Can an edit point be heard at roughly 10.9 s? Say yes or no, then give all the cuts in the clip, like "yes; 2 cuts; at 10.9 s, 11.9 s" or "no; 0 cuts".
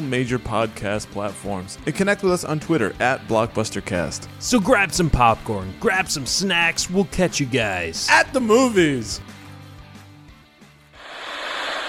yes; 1 cut; at 10.9 s